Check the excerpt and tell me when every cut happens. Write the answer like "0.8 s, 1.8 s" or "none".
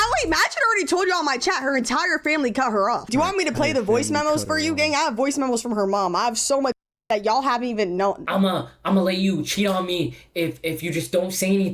3.1 s, 5.1 s, 8.2 s